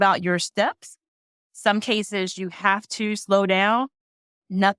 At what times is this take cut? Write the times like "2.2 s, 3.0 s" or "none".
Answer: none